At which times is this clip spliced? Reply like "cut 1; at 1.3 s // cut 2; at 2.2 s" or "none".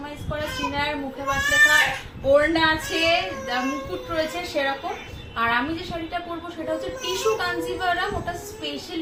none